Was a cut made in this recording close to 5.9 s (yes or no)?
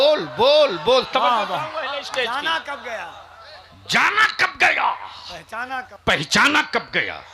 yes